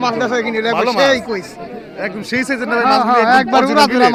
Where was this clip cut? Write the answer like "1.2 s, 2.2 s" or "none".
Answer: none